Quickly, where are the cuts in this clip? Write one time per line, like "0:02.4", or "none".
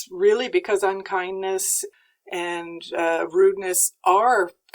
0:01.8